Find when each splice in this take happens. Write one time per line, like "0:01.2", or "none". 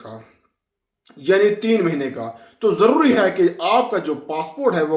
none

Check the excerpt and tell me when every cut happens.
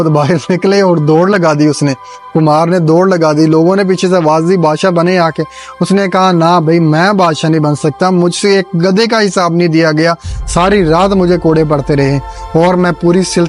none

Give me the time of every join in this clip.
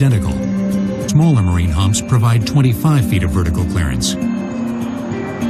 none

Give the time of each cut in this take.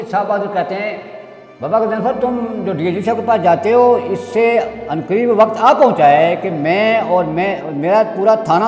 none

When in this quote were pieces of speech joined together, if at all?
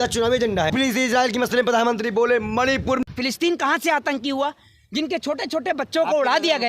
0:03.0

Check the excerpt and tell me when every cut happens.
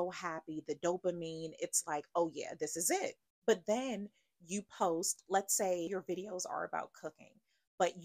0:03.3
0:05.9

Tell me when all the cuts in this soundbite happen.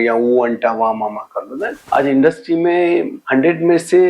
0:01.7
0:03.2

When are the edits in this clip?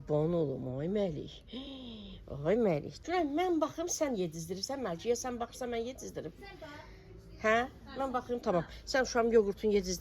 0:02.9

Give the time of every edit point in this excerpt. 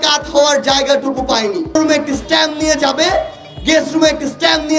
0:01.8

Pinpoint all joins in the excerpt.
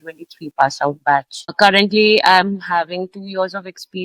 none

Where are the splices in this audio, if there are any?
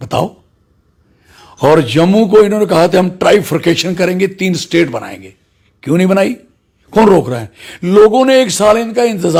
none

